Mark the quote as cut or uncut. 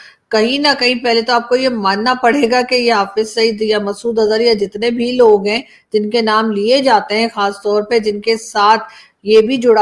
uncut